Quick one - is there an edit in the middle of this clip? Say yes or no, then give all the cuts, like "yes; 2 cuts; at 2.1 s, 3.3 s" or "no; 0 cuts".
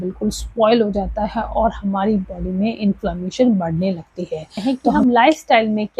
yes; 1 cut; at 4.5 s